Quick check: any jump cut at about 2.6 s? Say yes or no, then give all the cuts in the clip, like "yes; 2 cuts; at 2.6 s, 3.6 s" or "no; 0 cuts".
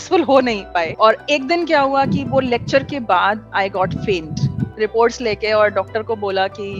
no; 2 cuts; at 0.9 s, 4.7 s